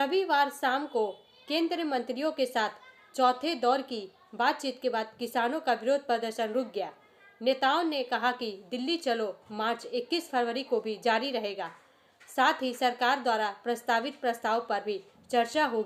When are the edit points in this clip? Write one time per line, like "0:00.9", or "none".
none